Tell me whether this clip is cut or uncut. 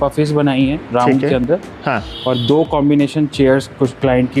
uncut